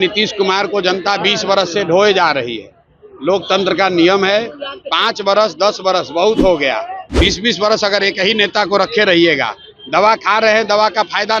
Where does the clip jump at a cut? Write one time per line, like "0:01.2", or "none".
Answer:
none